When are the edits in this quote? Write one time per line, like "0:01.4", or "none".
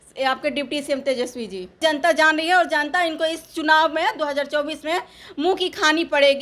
0:01.8